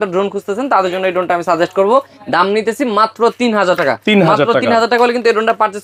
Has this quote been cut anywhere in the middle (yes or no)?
no